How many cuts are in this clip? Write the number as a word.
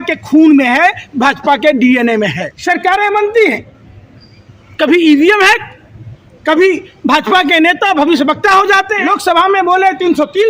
two